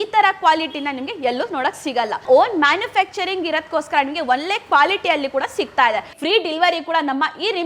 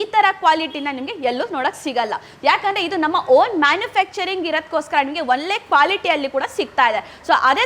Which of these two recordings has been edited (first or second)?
first